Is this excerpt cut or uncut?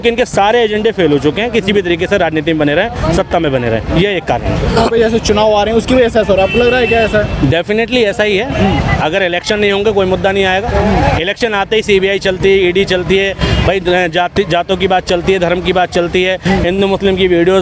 cut